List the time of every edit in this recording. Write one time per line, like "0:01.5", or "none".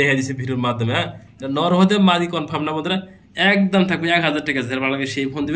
none